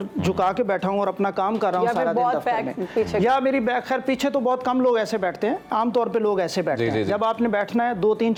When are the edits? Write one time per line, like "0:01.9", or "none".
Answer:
none